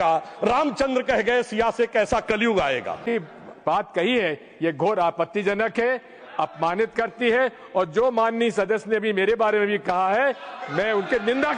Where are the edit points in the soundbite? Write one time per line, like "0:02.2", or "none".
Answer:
0:03.1